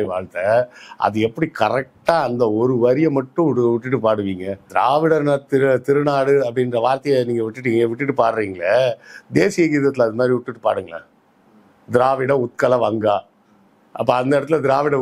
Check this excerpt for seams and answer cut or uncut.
cut